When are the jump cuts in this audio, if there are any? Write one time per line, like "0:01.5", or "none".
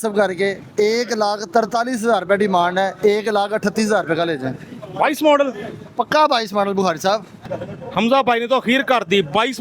0:07.4